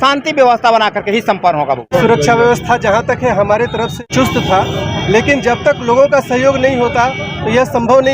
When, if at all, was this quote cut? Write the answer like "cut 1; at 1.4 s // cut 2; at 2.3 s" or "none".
cut 1; at 1.9 s // cut 2; at 4.0 s